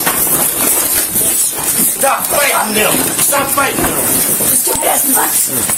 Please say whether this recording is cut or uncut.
uncut